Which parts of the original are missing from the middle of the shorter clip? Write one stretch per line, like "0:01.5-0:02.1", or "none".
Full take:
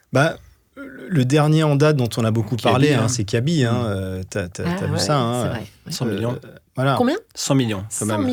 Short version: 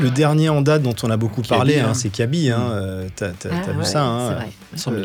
none